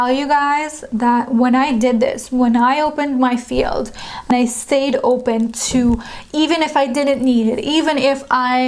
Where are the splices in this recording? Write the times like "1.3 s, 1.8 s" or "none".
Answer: 4.3 s